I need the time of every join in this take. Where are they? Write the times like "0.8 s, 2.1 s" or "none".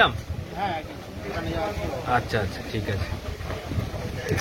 none